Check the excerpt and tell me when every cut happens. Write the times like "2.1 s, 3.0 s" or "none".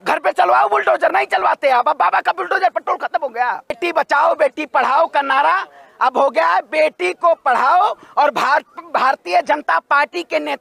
3.8 s